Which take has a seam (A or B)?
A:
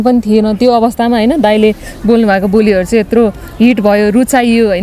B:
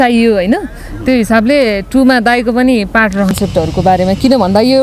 B